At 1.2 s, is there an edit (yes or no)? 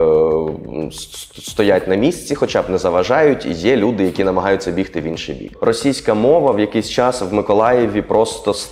no